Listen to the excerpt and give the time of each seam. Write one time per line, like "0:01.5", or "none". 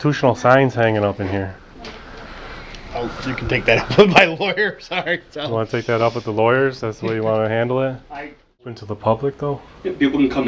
0:08.8